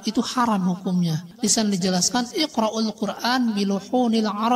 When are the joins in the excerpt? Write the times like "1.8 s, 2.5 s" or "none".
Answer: 1.3 s